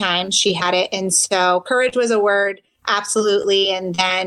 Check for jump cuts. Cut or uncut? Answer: uncut